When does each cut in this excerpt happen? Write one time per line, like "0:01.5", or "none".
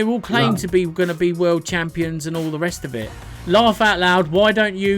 0:03.3